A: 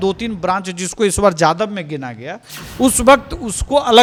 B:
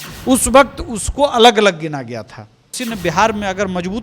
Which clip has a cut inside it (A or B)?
B